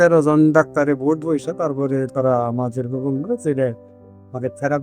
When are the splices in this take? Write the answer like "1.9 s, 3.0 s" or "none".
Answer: none